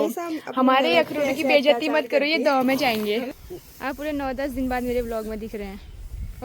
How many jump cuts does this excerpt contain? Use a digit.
1